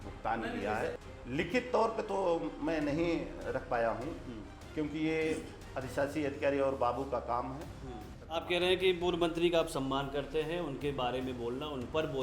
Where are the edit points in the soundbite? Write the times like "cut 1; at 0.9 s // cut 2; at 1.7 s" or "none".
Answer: cut 1; at 1.0 s // cut 2; at 8.2 s